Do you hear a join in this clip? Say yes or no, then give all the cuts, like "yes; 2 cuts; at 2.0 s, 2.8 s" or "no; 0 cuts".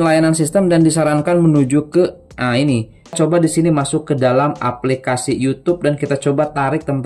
yes; 1 cut; at 3.2 s